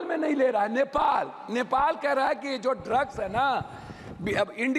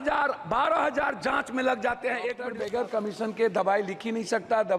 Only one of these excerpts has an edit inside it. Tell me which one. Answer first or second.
second